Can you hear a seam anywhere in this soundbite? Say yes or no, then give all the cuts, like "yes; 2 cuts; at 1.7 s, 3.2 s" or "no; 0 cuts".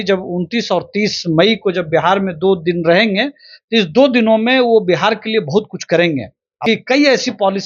yes; 1 cut; at 6.6 s